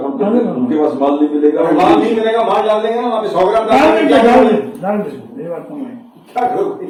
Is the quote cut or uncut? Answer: uncut